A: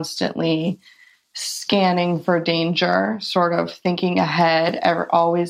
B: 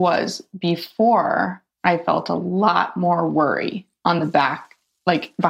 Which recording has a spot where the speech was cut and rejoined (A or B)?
B